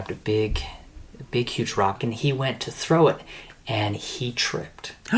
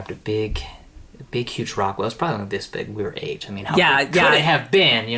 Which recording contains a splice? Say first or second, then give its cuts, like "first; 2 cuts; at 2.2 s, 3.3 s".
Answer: first; 1 cut; at 2.0 s